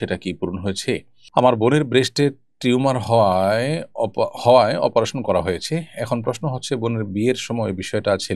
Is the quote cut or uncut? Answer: cut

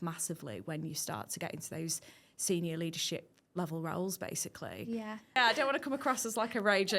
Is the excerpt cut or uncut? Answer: cut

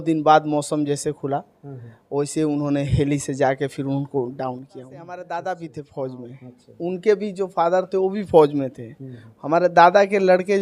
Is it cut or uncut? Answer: cut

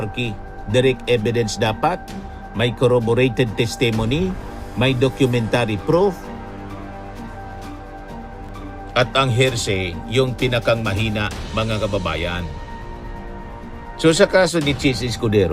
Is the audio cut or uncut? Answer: uncut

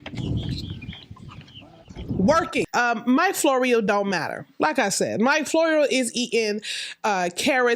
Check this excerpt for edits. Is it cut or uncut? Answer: cut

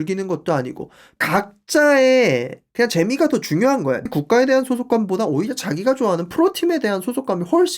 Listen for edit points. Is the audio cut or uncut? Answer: cut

